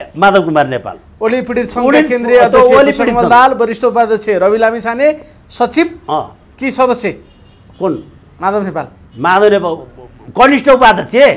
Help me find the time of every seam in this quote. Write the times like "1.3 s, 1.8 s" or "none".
none